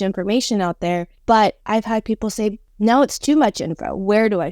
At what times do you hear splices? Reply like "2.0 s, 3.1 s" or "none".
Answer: 1.1 s, 2.7 s